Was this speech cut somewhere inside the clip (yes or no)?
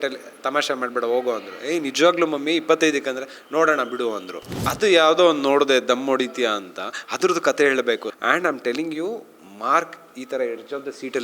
yes